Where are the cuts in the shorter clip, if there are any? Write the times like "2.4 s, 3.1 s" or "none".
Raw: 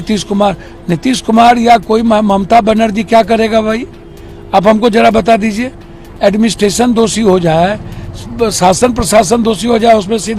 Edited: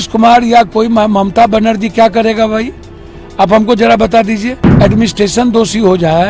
4.6 s